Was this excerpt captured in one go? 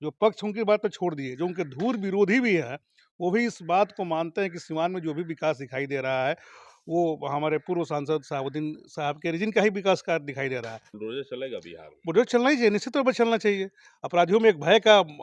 no; 1 cut; at 11.0 s

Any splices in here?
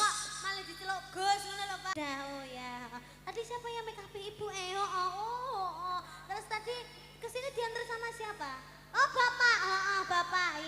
yes; 1 cut; at 1.9 s

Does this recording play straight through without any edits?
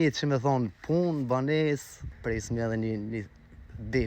no; 1 cut; at 2.1 s

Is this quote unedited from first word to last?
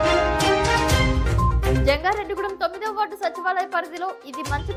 yes; 0 cuts

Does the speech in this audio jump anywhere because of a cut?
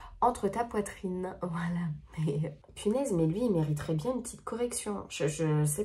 yes; 1 cut; at 2.7 s

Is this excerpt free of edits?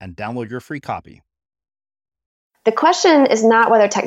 no; 1 cut; at 2.4 s

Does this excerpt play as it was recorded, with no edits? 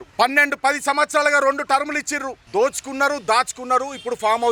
yes; 0 cuts

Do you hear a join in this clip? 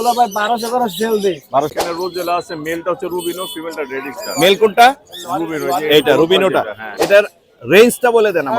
yes; 2 cuts; at 1.8 s, 6.8 s

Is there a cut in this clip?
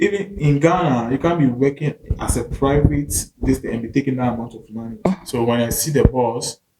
yes; 1 cut; at 5.1 s

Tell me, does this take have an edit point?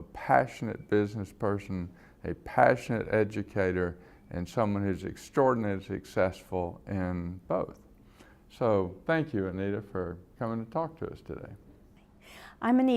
no; 0 cuts

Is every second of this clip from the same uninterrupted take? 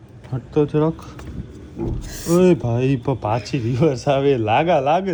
yes; 0 cuts

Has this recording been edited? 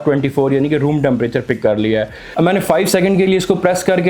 yes; 1 cut; at 2.2 s

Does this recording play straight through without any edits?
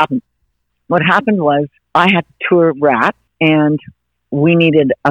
no; 2 cuts; at 1.8 s, 3.2 s

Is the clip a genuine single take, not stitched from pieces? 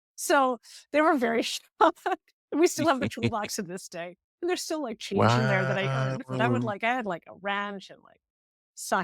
yes; 0 cuts

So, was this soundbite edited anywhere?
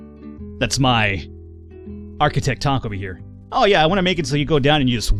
no; 0 cuts

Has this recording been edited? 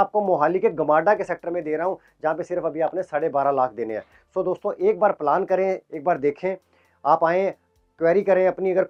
no; 0 cuts

